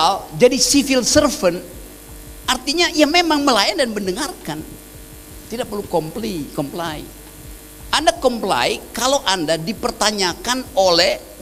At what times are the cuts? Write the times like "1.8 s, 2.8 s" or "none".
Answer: none